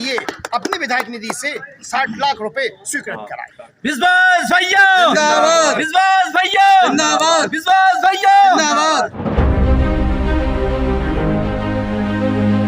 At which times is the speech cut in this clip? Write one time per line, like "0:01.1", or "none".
0:09.1